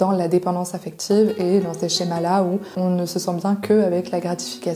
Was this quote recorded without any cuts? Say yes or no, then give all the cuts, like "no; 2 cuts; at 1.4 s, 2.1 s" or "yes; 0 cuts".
yes; 0 cuts